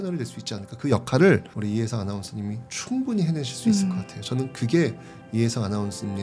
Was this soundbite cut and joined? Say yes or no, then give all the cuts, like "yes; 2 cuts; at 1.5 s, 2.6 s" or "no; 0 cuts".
no; 0 cuts